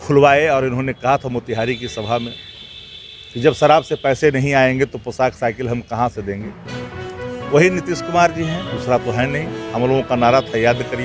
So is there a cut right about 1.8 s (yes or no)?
yes